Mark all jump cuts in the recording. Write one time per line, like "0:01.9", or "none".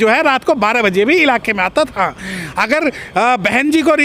none